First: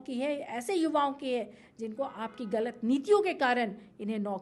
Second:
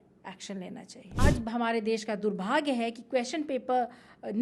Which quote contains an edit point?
second; 1 cut; at 1.0 s

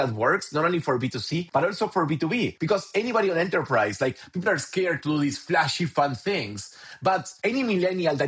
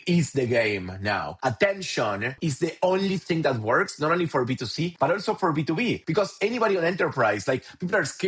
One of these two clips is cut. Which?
second; 1 cut; at 2.4 s

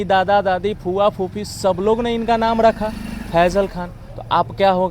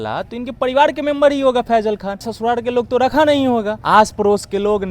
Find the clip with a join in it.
second; 2 cuts; at 2.3 s, 3.8 s

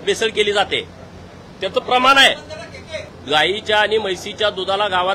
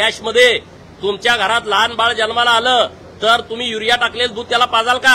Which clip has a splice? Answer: first; 1 cut; at 3.1 s

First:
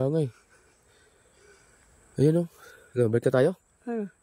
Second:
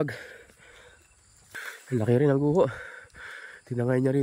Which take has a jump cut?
second; 1 cut; at 1.5 s

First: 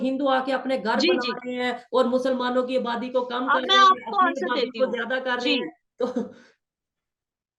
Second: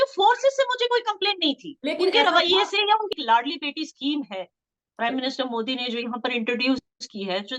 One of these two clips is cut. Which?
second; 1 cut; at 3.1 s

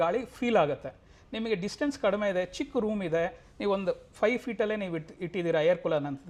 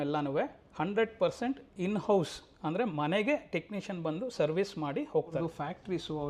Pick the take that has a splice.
second; 1 cut; at 5.3 s

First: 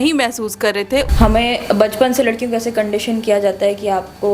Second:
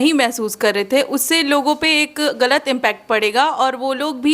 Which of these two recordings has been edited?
first; 1 cut; at 1.1 s

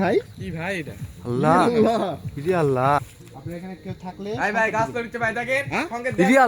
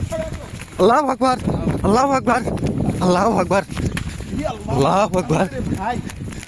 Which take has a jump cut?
first; 1 cut; at 3.2 s

